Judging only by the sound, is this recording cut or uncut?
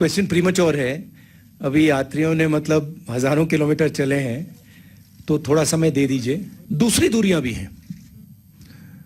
cut